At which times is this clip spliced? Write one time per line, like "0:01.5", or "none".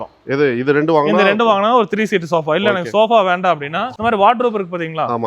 0:03.9